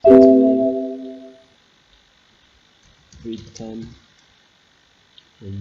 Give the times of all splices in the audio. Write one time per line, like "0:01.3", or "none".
0:01.4